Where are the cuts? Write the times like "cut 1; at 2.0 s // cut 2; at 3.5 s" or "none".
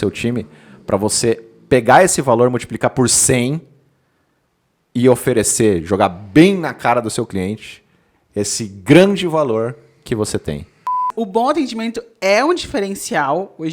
cut 1; at 11.1 s